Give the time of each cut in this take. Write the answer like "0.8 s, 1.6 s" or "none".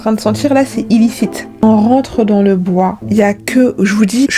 1.6 s, 3.0 s